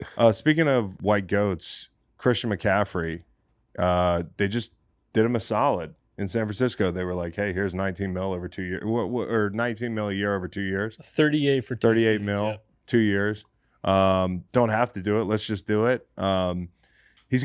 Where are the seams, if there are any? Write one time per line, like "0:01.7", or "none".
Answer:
none